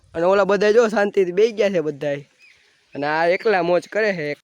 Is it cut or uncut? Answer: uncut